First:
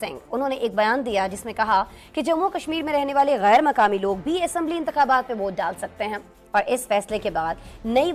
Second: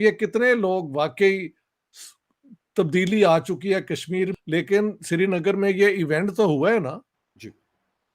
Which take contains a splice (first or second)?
second